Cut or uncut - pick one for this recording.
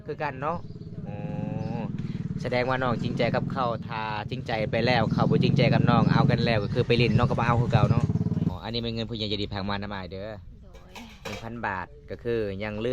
cut